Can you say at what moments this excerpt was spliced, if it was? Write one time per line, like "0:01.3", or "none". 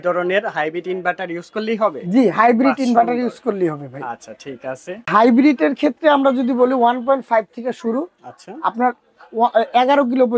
0:05.1